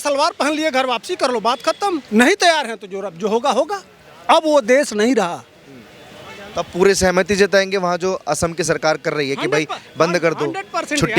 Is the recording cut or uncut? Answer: uncut